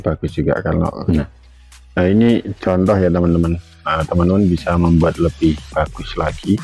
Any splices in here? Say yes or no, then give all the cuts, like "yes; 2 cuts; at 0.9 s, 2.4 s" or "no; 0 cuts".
yes; 1 cut; at 1.0 s